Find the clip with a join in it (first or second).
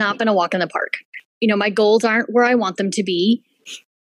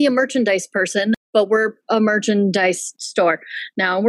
second